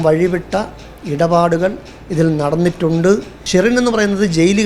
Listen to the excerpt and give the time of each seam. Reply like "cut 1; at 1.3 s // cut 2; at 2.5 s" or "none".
cut 1; at 3.3 s